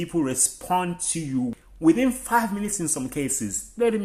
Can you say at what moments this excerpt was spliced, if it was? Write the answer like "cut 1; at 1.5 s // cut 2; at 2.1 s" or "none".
cut 1; at 1.5 s